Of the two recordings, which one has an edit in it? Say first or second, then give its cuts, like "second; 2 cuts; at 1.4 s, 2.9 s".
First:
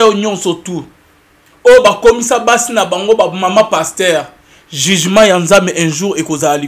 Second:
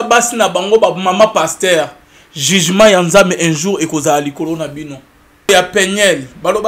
second; 1 cut; at 5.5 s